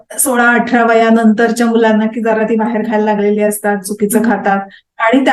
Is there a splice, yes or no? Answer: no